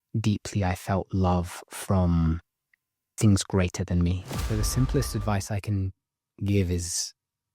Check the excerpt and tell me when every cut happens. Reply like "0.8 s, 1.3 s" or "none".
4.4 s